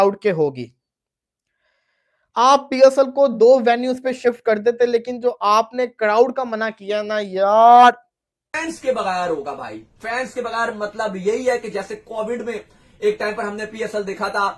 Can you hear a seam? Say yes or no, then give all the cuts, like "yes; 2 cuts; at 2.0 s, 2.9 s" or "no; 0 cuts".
yes; 1 cut; at 8.6 s